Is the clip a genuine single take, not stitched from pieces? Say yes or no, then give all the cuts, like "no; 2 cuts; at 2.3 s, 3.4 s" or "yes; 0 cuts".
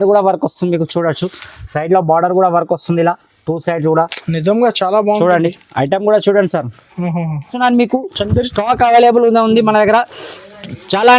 no; 1 cut; at 7.5 s